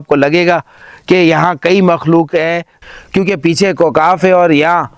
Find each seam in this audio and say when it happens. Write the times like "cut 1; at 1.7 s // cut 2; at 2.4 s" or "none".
cut 1; at 2.8 s